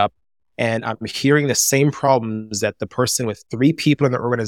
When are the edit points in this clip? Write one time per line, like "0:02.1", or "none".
0:03.4